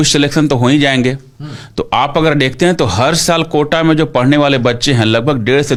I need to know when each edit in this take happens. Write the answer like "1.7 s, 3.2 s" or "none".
none

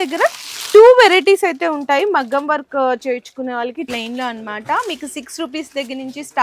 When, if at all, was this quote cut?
3.9 s

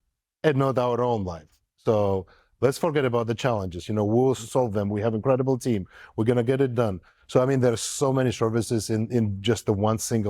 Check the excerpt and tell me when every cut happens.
4.4 s, 7.1 s

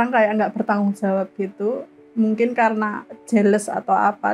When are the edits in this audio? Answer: none

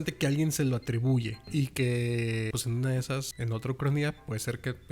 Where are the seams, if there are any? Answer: 1.5 s, 2.5 s, 3.3 s

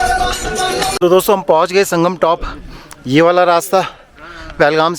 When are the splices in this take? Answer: 1.0 s

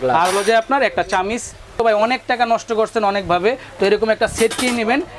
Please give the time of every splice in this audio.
1.8 s

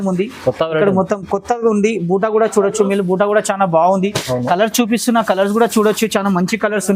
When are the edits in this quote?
none

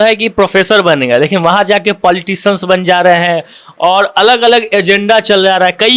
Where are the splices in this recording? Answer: none

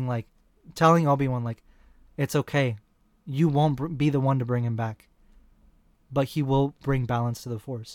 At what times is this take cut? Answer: 6.6 s

